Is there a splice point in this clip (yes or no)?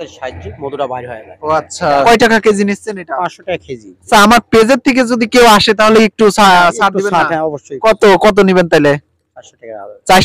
yes